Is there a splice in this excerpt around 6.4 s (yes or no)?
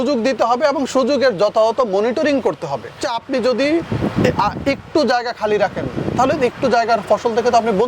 no